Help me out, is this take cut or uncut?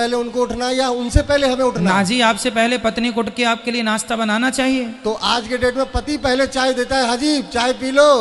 uncut